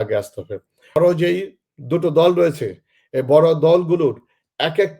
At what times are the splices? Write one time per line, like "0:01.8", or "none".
0:01.0